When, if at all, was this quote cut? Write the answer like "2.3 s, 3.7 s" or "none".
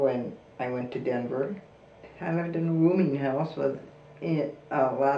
2.1 s